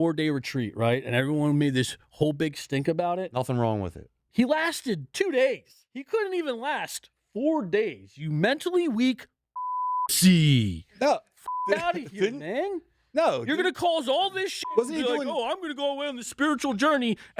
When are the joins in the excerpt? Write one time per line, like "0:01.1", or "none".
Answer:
0:04.2